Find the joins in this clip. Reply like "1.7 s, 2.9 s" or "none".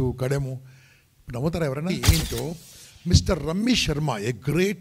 2.0 s